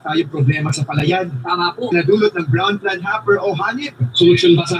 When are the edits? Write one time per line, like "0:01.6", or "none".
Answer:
0:01.8